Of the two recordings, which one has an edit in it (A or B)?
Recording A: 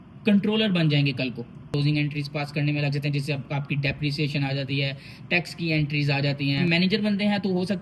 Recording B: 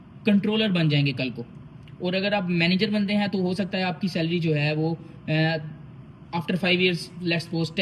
A